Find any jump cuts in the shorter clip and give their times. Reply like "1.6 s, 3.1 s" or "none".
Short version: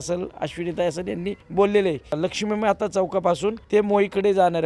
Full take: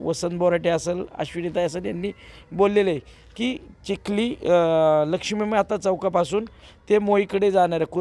1.4 s, 2.2 s, 3.6 s